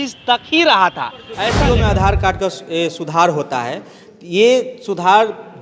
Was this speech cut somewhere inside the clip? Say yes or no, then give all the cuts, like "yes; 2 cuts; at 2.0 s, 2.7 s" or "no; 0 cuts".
yes; 1 cut; at 1.4 s